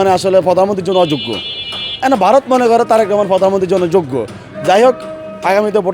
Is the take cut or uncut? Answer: uncut